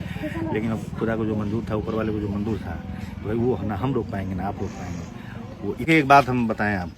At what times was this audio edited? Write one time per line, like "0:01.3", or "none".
0:05.9